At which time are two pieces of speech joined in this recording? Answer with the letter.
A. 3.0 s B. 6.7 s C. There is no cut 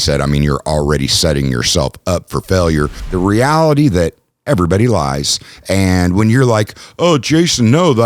A